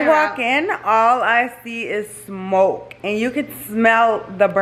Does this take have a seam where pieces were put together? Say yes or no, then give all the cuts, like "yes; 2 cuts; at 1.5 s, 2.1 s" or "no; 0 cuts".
no; 0 cuts